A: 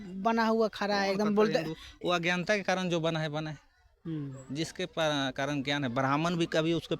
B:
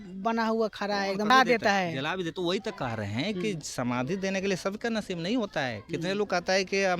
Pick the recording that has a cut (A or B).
B